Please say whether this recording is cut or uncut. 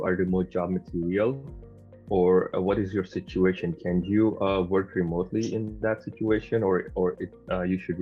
uncut